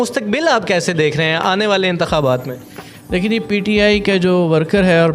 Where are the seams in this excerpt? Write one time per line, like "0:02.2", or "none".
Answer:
none